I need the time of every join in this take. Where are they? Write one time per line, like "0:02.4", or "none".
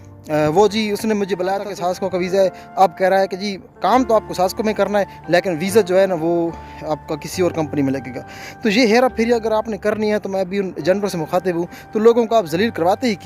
0:01.7